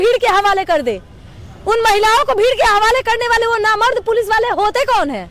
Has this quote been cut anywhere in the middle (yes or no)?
no